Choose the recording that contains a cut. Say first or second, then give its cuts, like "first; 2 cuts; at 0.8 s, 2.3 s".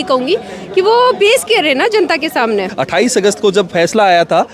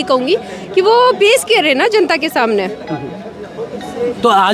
first; 1 cut; at 2.7 s